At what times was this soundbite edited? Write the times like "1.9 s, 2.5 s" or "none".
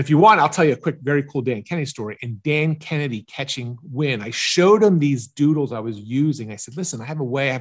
none